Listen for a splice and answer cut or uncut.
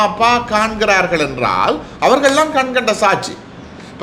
uncut